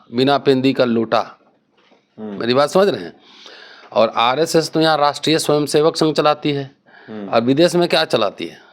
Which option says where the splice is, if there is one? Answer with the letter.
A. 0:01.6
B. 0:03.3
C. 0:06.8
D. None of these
D